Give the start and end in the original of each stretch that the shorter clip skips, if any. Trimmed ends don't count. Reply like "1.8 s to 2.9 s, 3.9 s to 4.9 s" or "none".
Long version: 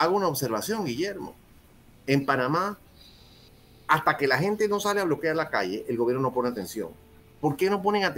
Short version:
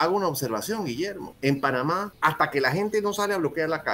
1.2 s to 1.9 s, 2.8 s to 3.8 s

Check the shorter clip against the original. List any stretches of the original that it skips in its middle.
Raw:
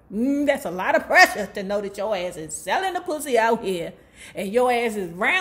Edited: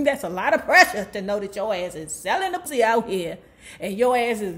3.1 s to 3.2 s

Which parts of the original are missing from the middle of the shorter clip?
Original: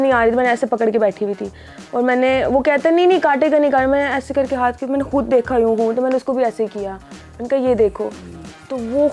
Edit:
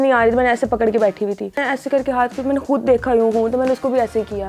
1.6 s to 4.1 s

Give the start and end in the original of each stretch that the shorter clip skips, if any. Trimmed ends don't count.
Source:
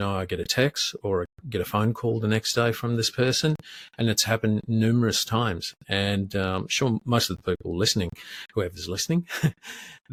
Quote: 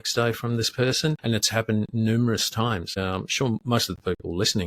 3.6 s to 3.9 s, 5.7 s to 6.3 s

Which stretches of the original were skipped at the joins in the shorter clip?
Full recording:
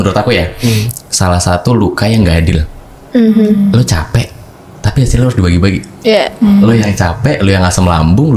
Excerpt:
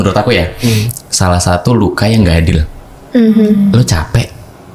none

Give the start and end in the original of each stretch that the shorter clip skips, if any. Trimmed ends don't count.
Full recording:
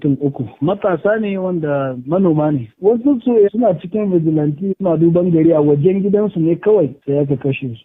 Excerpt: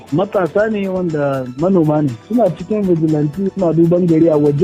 2.8 s to 3.5 s

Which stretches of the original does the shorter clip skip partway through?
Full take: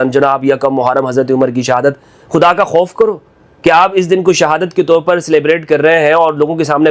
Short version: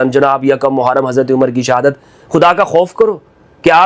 none

